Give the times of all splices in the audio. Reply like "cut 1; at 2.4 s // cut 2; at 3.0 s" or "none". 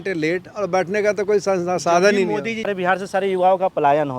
cut 1; at 2.7 s

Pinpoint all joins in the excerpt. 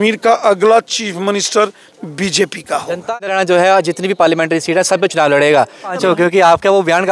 cut 1; at 3.1 s // cut 2; at 6.0 s

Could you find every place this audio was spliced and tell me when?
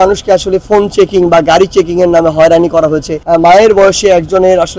cut 1; at 3.2 s

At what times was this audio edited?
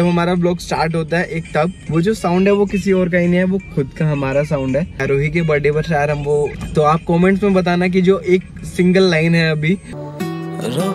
cut 1; at 1.8 s // cut 2; at 5.0 s // cut 3; at 6.6 s // cut 4; at 10.0 s

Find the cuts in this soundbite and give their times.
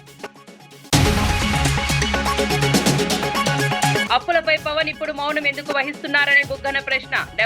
cut 1; at 0.9 s // cut 2; at 3.9 s

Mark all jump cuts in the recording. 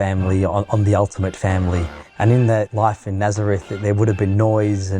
cut 1; at 2.0 s // cut 2; at 2.7 s

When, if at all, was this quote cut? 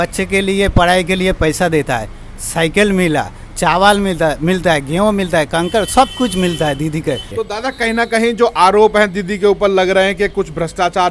cut 1; at 7.3 s

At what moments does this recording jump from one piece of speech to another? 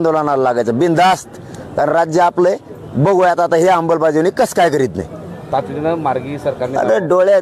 cut 1; at 5.4 s

